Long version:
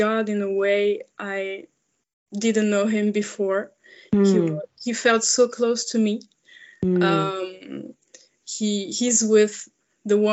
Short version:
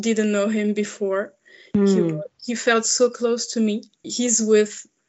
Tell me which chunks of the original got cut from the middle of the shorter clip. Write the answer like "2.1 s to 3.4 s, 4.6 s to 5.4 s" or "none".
6.4 s to 8.9 s